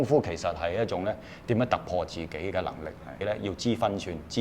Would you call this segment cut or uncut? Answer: cut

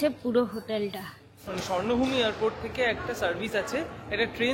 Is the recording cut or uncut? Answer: cut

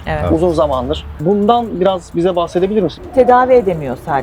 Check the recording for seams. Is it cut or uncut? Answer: cut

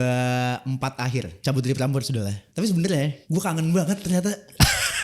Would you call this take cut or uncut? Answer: cut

